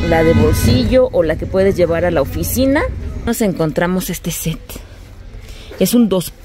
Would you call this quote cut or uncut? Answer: cut